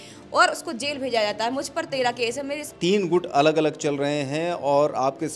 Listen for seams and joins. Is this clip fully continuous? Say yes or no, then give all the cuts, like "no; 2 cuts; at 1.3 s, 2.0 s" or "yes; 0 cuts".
no; 1 cut; at 2.6 s